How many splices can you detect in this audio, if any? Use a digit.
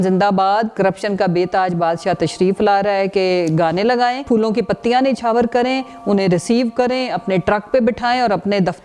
2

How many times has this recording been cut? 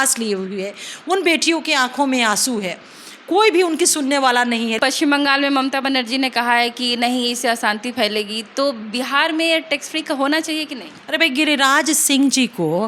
1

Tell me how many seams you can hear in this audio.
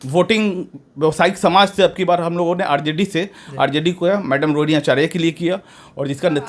0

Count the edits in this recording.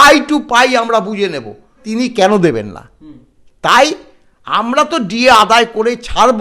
1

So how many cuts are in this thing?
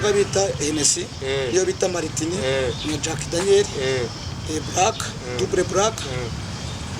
0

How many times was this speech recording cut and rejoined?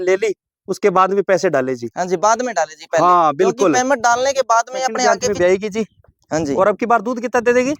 1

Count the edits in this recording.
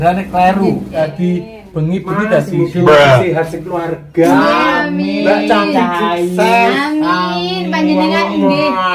1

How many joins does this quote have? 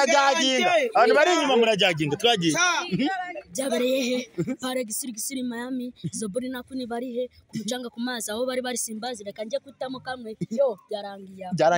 0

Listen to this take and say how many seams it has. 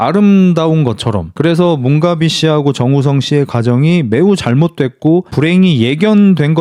0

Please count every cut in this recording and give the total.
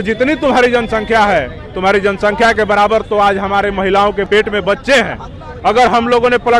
1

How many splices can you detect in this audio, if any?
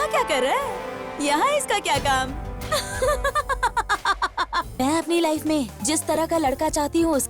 1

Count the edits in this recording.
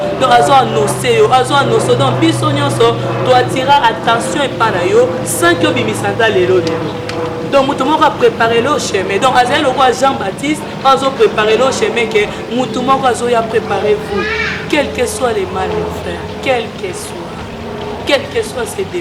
0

